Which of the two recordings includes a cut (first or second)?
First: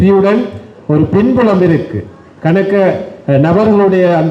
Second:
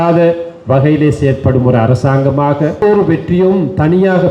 second